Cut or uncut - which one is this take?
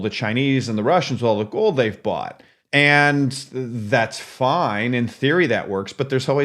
uncut